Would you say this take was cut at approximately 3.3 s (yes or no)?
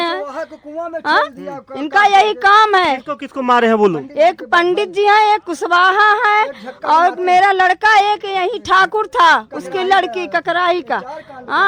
no